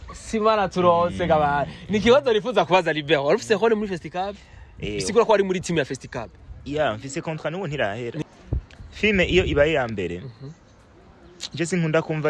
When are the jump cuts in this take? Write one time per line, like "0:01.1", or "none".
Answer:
0:08.2